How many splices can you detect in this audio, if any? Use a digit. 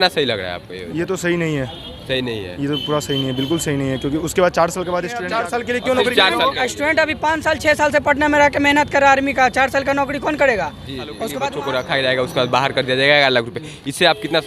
2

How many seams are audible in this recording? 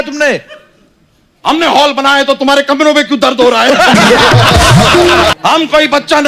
1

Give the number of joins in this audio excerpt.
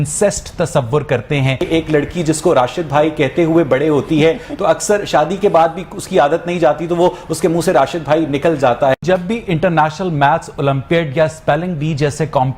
2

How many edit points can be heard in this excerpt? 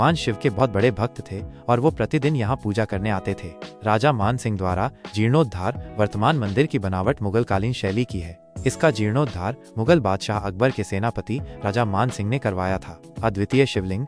0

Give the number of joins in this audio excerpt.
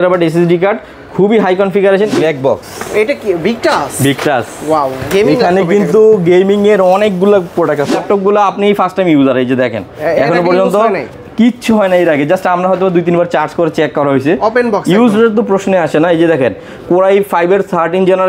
2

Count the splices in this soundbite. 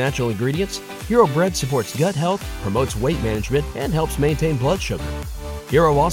0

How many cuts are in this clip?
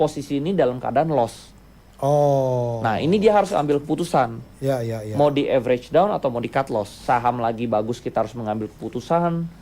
1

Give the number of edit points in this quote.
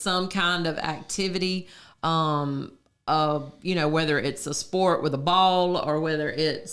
0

